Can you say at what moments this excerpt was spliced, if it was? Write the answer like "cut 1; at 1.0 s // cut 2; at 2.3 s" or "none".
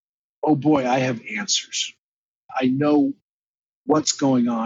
cut 1; at 2.5 s